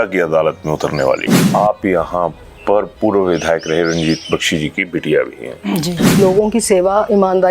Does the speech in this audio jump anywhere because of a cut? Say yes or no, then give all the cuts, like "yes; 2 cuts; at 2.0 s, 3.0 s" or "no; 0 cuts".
yes; 2 cuts; at 1.4 s, 6.2 s